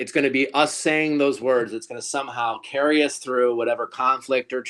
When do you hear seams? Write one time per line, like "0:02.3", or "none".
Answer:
none